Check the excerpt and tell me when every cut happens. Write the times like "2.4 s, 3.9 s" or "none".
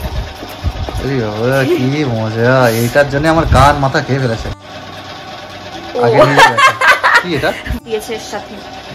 4.6 s, 7.8 s